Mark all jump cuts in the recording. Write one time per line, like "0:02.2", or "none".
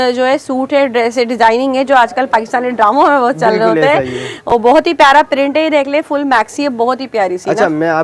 none